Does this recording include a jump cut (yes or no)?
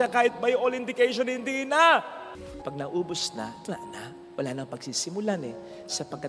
yes